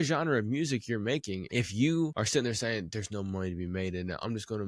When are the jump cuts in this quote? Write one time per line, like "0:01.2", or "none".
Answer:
0:01.4
0:02.1